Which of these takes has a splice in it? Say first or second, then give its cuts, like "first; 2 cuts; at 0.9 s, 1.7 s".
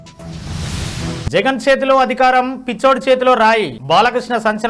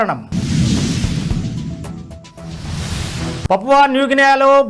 first; 1 cut; at 1.1 s